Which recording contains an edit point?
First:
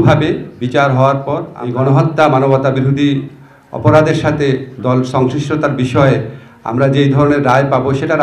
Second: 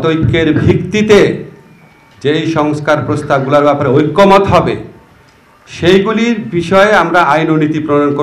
first; 1 cut; at 1.5 s

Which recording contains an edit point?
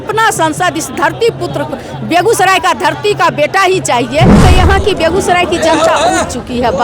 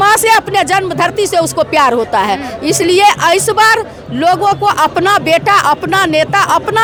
first; 1 cut; at 4.4 s

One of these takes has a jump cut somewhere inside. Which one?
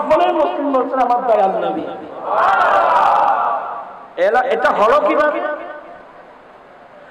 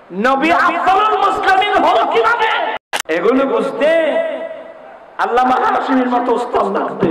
second; 1 cut; at 2.9 s

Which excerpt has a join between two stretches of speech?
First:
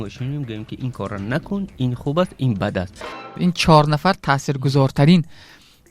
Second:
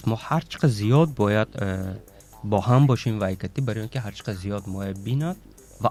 first; 1 cut; at 3.1 s

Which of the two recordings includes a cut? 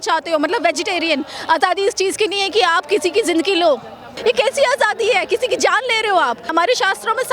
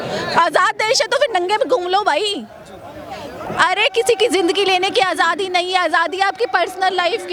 first; 2 cuts; at 4.1 s, 6.5 s

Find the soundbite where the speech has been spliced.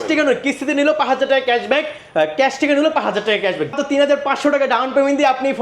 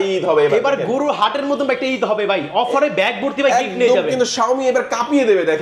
first; 1 cut; at 3.7 s

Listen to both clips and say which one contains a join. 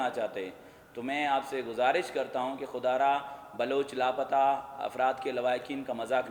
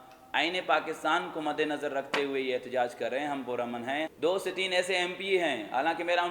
second; 1 cut; at 4.1 s

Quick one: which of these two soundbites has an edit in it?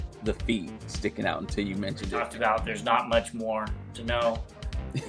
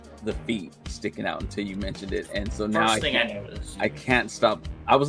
first; 1 cut; at 2.2 s

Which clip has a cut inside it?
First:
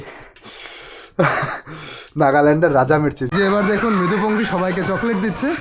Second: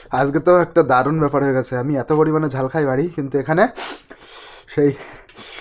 first; 1 cut; at 3.2 s

